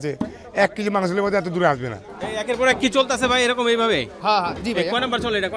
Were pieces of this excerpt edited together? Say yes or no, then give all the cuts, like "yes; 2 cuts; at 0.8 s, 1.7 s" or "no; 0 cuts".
yes; 1 cut; at 2.0 s